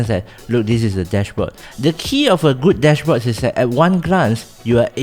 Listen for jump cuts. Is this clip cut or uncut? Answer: cut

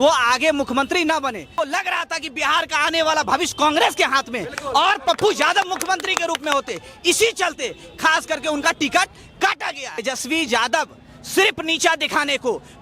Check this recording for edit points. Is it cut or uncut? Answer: cut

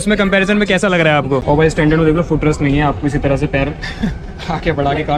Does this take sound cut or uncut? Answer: cut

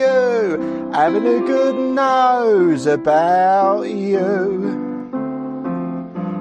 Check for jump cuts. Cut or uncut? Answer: uncut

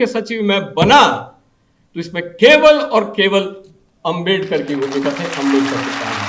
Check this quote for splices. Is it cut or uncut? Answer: uncut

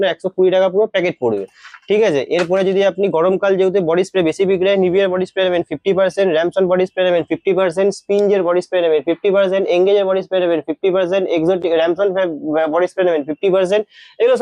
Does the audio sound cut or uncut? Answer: uncut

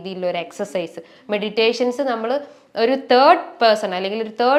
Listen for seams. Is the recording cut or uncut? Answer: uncut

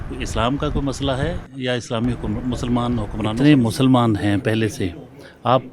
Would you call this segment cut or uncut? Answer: cut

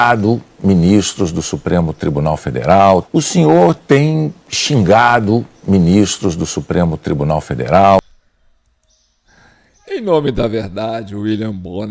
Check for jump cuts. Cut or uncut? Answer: uncut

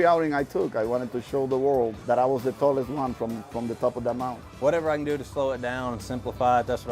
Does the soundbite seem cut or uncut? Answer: cut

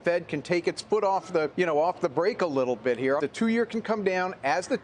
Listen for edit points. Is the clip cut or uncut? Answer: cut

